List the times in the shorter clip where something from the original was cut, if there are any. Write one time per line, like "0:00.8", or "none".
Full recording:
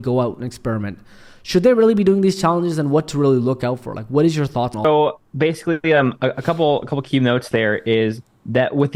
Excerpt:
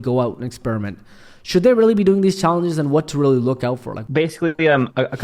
0:04.0